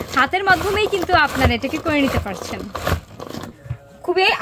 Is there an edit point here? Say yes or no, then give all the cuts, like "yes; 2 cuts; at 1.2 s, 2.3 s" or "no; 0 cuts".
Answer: yes; 1 cut; at 3.5 s